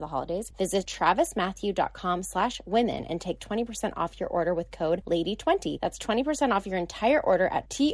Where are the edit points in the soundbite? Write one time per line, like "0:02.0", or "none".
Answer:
0:00.8
0:05.0
0:05.8

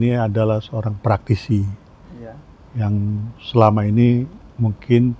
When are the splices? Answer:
none

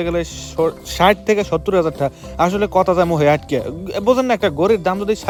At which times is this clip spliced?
none

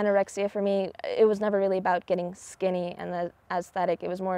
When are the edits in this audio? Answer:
0:00.9

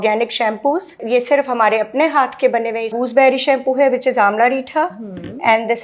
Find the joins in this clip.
0:01.0
0:02.9

